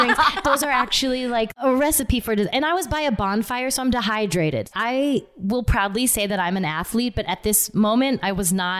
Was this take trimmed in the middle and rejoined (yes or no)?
yes